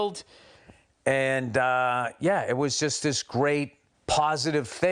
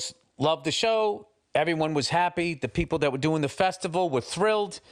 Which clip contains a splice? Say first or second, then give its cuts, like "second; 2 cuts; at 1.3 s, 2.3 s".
first; 1 cut; at 3.9 s